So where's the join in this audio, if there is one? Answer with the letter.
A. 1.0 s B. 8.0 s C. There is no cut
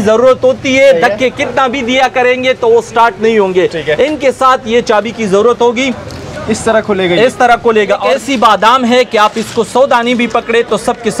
B